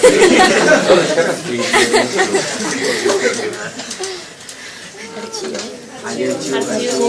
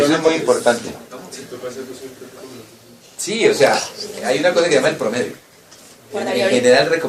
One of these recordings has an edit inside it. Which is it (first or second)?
first